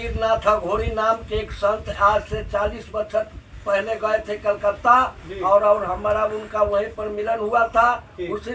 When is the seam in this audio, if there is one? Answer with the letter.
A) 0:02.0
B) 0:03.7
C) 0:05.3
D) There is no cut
D